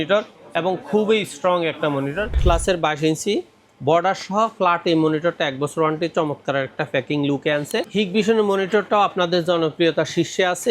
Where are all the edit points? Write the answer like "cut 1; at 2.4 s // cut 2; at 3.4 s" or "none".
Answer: cut 1; at 2.4 s // cut 2; at 7.9 s

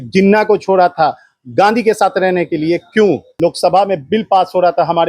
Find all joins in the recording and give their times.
cut 1; at 3.3 s

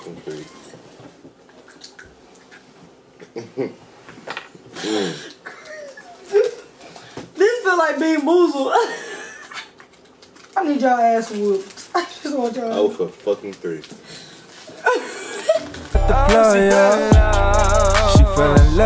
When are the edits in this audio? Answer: cut 1; at 10.6 s // cut 2; at 15.8 s // cut 3; at 17.6 s

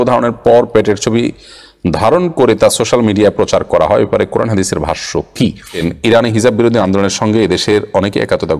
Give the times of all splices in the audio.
cut 1; at 5.8 s

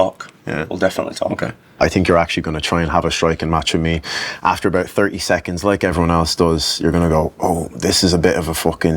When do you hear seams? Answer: cut 1; at 1.8 s

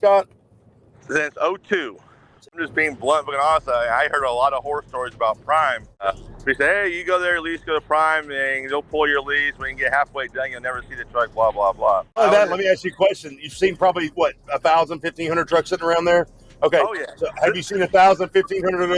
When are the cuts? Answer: cut 1; at 2.6 s // cut 2; at 6.0 s // cut 3; at 12.2 s

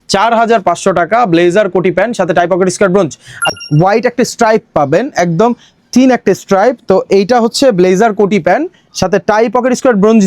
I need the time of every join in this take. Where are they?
cut 1; at 3.5 s

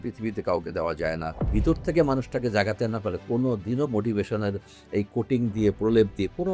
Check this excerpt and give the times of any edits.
cut 1; at 1.4 s

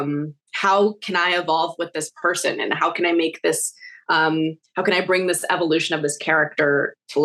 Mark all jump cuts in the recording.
none

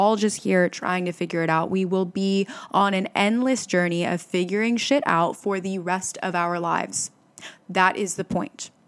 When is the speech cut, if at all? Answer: cut 1; at 2.6 s

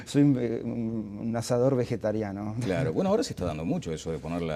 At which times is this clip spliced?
none

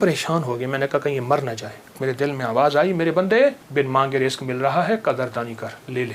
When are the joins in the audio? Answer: cut 1; at 2.0 s // cut 2; at 3.6 s

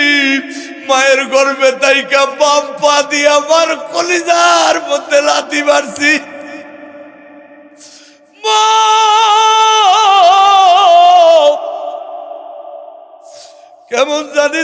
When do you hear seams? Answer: none

